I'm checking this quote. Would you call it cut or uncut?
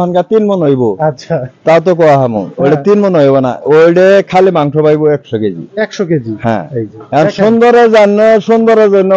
uncut